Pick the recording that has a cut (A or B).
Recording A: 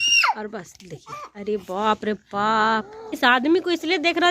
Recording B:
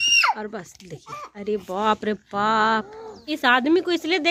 A